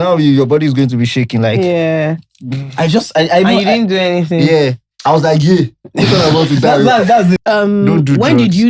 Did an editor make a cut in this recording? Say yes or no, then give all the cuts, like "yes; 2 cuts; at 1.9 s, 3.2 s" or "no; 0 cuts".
yes; 1 cut; at 7.4 s